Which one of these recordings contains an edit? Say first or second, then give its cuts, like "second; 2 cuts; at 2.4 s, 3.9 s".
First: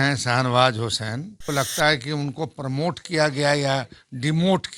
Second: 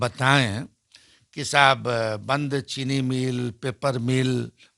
first; 1 cut; at 1.4 s